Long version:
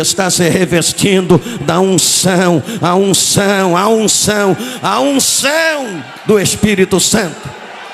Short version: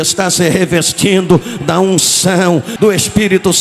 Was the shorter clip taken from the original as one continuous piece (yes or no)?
no